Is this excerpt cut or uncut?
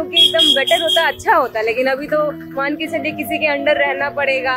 uncut